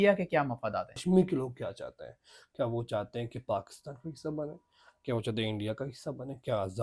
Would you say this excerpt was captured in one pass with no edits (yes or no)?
no